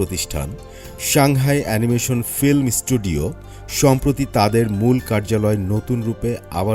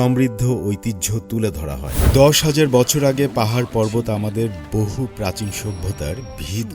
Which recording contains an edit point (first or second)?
second